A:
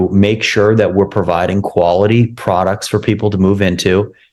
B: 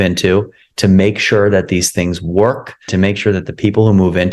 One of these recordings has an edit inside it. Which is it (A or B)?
B